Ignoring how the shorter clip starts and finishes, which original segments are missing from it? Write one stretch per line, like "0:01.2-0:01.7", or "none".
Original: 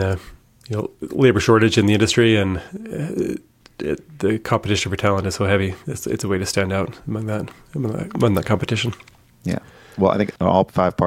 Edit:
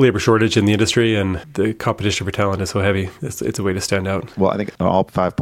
0:02.7-0:04.1
0:06.9-0:09.9